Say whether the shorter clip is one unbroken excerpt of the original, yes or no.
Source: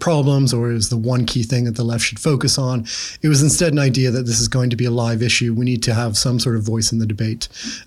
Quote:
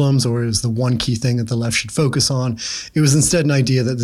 yes